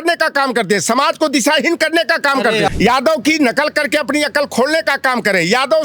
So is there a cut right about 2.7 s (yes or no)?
yes